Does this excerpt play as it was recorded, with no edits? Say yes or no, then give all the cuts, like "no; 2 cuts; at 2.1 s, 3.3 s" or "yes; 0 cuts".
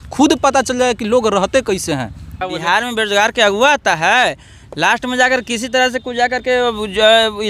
no; 1 cut; at 2.3 s